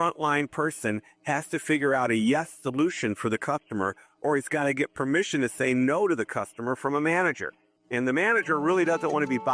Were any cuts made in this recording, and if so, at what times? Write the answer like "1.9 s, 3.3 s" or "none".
none